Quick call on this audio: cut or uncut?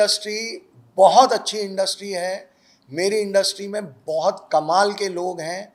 uncut